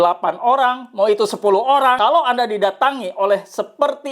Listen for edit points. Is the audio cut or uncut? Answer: cut